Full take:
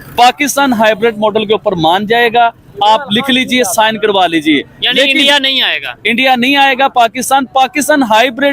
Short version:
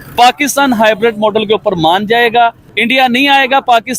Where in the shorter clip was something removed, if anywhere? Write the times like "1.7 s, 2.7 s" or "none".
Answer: 2.6 s